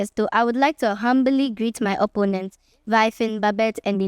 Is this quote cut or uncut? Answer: uncut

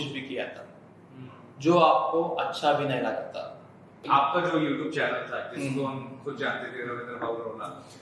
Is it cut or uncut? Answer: cut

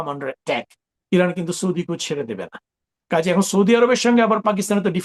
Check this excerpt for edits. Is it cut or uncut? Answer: uncut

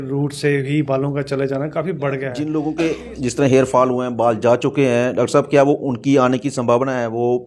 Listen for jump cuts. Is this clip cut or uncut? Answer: cut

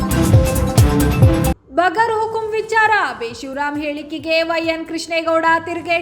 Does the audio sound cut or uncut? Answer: cut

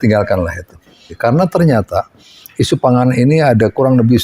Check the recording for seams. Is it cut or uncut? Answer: cut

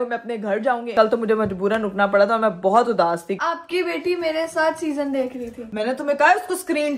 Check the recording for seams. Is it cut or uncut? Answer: cut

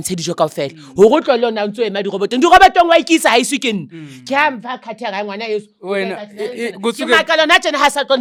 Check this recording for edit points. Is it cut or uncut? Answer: uncut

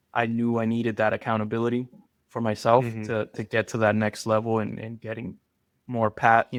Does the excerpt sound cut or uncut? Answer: uncut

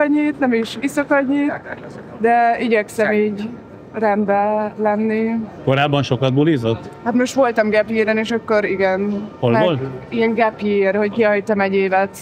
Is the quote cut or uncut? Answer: uncut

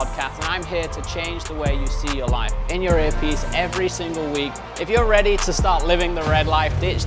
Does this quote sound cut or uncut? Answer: uncut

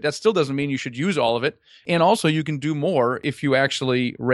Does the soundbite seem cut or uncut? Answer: cut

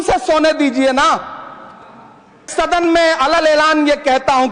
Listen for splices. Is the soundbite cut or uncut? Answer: cut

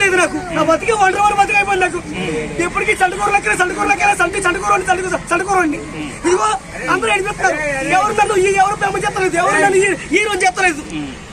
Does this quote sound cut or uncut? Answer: uncut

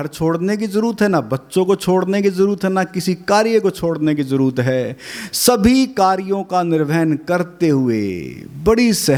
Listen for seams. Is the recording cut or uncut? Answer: uncut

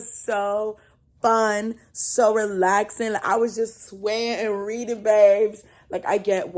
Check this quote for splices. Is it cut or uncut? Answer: uncut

